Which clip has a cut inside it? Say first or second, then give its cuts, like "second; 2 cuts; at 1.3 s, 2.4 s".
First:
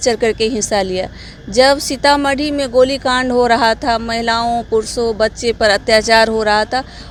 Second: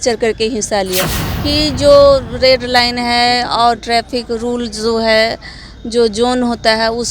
second; 1 cut; at 1.2 s